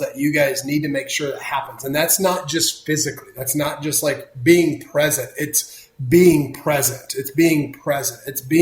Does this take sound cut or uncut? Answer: uncut